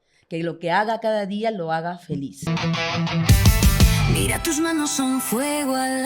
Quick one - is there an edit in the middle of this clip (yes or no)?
yes